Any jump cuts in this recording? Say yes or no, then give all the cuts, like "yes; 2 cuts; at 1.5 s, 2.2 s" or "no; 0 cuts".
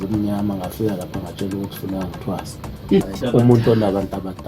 yes; 1 cut; at 3.2 s